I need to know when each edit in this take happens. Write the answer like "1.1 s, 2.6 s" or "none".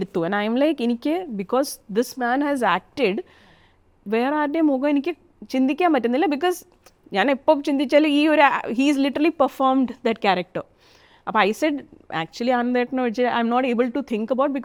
none